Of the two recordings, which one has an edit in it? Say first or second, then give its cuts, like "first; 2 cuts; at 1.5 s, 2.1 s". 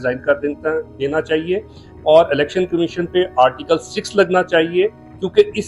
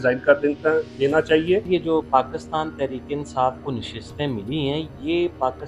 second; 1 cut; at 1.7 s